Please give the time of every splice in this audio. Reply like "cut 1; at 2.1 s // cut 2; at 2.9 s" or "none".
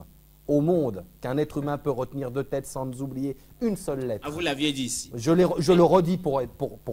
none